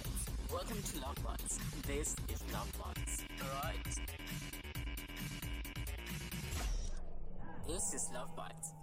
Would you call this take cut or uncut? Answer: uncut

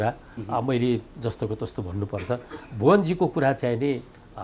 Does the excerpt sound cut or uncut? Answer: uncut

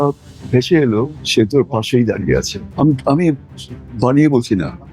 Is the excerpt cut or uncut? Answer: cut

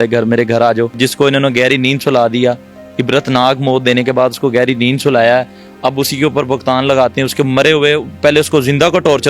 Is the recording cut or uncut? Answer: cut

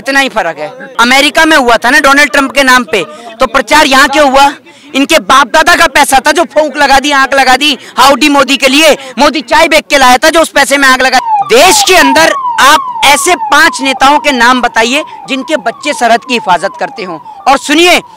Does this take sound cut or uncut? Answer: cut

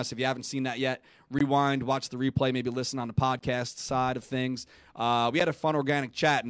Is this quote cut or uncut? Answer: uncut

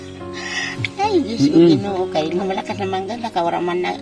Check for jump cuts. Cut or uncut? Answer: uncut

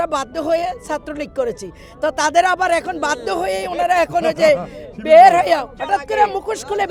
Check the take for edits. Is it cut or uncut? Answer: uncut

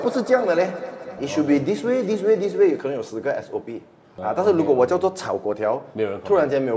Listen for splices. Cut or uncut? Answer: cut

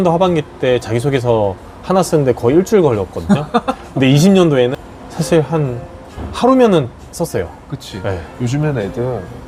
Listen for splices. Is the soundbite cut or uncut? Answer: uncut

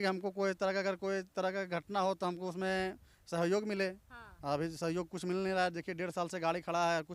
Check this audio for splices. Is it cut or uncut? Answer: uncut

